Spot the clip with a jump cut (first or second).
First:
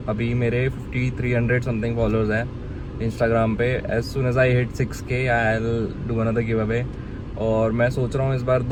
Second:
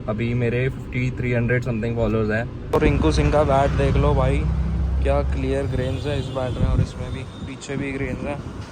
second